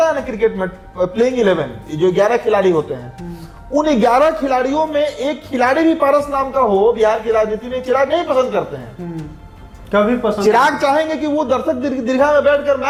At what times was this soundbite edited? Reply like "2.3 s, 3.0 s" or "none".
none